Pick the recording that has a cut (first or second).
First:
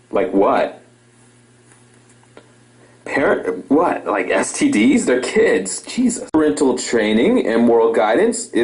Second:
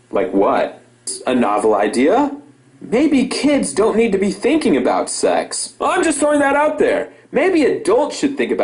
first